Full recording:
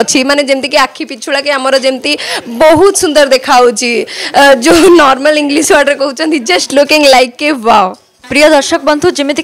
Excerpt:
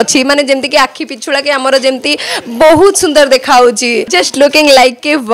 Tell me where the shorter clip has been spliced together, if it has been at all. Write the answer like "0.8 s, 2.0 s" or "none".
4.2 s